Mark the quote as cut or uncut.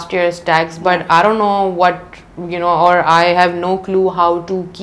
uncut